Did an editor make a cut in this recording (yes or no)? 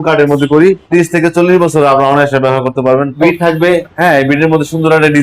yes